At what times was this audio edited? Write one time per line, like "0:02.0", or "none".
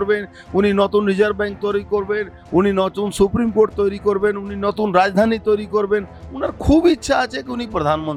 none

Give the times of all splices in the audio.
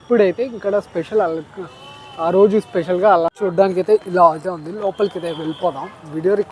0:03.3

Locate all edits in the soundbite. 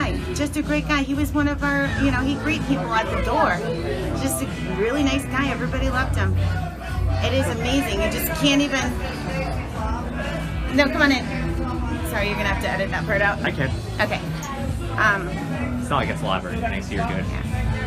none

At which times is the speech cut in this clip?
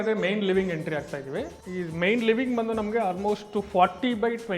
0:01.6

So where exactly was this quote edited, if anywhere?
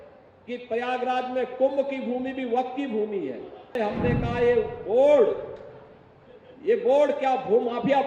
0:03.8

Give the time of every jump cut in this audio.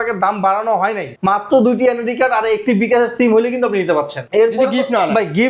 0:01.1
0:04.2

